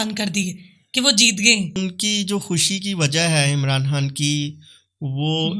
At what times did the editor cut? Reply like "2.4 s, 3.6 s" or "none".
1.8 s